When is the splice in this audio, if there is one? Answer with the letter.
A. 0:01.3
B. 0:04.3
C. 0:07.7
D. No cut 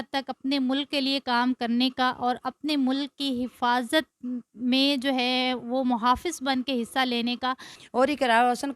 C